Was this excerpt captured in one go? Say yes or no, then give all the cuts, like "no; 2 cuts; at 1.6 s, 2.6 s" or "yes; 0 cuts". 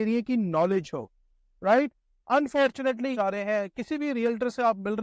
no; 1 cut; at 3.1 s